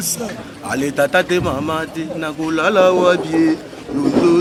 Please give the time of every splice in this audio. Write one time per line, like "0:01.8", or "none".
none